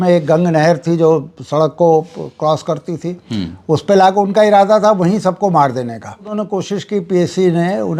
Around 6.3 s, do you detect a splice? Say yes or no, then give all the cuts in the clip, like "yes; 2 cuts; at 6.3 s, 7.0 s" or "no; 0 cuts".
yes; 1 cut; at 6.3 s